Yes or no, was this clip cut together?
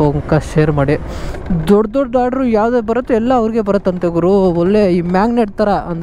yes